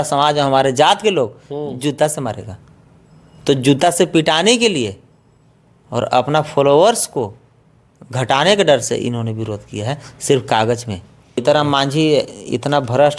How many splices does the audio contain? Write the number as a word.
one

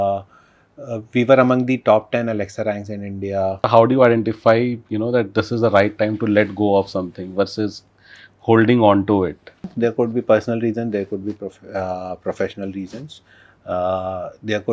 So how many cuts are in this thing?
two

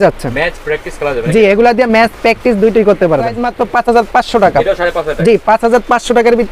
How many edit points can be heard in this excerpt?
one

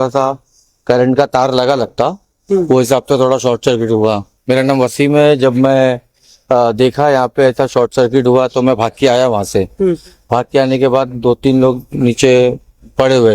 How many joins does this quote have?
one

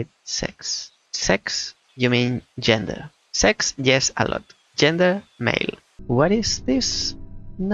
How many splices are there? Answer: one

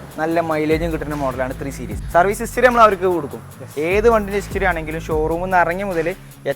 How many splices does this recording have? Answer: one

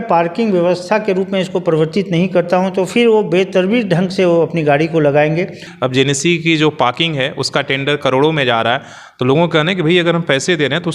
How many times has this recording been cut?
one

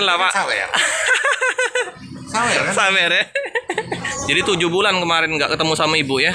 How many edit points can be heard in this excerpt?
one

